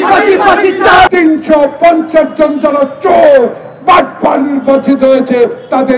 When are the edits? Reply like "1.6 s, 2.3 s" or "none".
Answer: 1.1 s